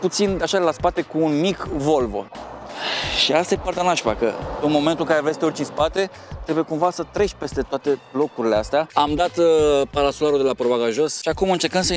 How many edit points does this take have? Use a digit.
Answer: 3